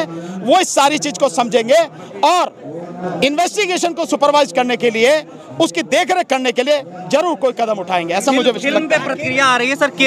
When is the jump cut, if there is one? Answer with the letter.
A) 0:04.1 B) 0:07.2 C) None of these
C